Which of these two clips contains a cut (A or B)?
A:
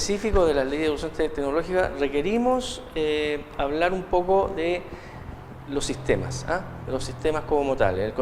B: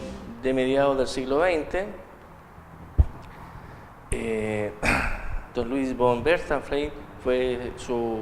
B